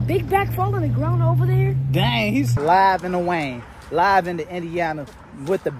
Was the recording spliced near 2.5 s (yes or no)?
yes